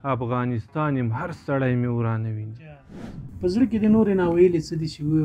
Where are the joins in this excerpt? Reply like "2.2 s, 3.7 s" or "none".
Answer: 3.2 s